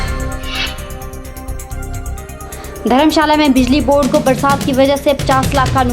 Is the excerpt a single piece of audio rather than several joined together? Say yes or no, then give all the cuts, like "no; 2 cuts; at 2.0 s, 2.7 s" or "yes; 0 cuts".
no; 1 cut; at 1.6 s